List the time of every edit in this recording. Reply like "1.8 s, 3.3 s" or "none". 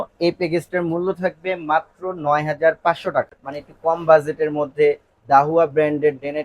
3.4 s